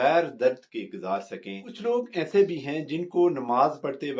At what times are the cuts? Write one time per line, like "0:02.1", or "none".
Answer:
0:01.7

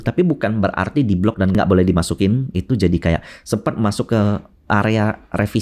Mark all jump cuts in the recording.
0:01.5

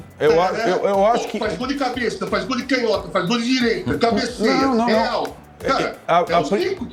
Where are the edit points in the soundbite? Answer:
none

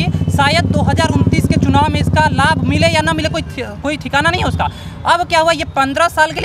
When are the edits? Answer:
none

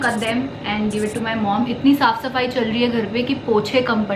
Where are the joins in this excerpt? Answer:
none

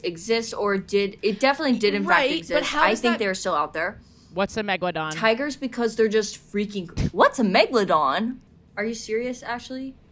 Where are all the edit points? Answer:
0:05.1
0:08.5

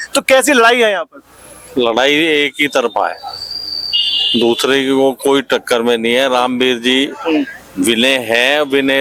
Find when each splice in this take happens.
none

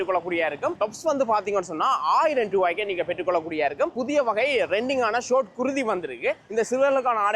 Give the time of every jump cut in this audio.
0:00.8
0:04.0
0:06.4

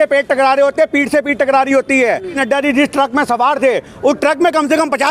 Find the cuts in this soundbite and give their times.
0:02.3

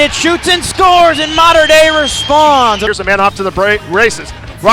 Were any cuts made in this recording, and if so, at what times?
0:02.8

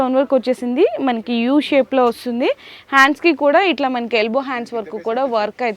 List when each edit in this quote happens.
none

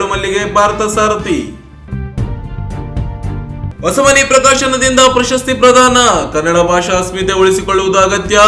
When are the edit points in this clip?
none

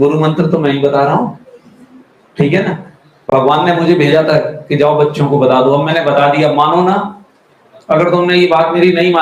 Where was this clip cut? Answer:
none

